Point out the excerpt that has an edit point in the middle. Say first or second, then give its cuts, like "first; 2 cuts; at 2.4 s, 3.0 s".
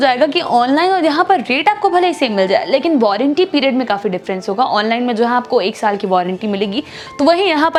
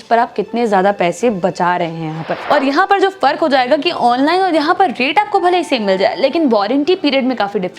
second; 1 cut; at 2.3 s